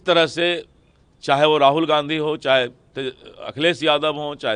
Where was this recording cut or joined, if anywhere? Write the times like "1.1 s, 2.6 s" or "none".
none